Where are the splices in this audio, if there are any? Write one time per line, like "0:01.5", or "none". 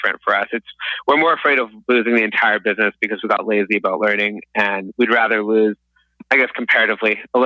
none